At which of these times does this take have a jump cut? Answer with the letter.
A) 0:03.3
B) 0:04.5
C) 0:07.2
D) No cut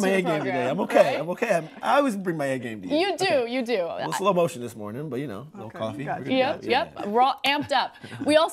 A